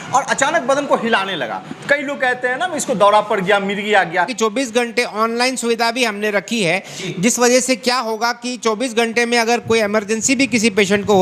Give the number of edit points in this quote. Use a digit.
1